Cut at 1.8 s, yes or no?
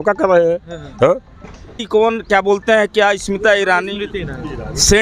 yes